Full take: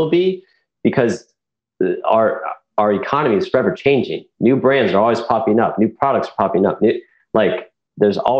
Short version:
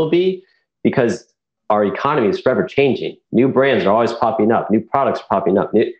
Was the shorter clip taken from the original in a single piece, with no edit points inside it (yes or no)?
no